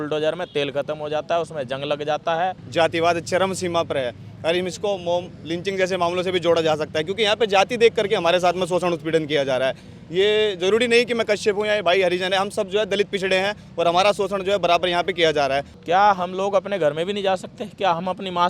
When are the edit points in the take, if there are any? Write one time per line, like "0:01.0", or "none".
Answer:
0:02.6
0:15.7